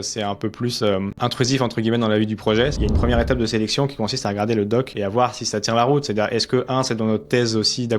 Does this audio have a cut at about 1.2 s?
yes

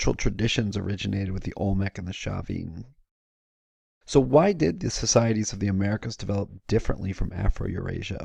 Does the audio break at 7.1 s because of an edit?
no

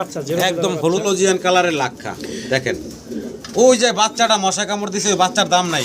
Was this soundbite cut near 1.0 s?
yes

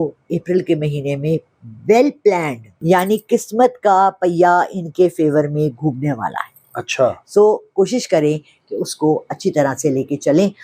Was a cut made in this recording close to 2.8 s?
yes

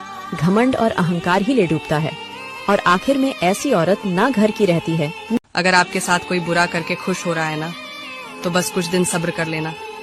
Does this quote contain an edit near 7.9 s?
no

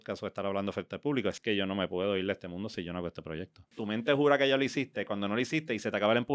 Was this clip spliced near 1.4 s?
yes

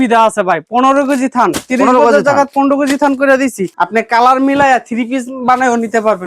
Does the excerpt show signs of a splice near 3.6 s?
yes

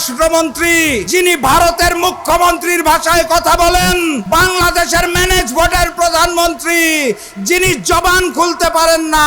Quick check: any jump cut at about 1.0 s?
yes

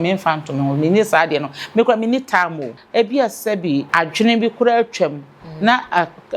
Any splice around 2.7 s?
yes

